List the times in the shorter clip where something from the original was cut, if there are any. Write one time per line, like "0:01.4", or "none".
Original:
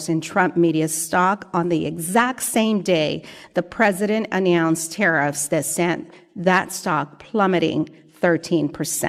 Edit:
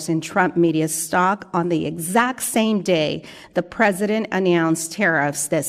none